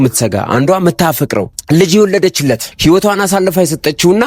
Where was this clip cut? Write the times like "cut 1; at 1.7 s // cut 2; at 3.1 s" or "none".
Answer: cut 1; at 1.6 s // cut 2; at 2.7 s

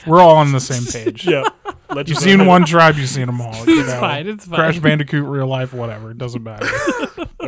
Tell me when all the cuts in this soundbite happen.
none

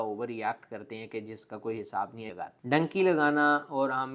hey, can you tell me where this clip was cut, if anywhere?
cut 1; at 2.3 s

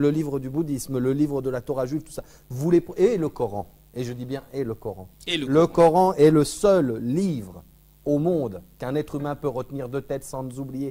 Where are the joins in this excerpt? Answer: none

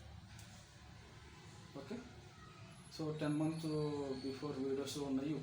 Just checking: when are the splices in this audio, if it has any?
none

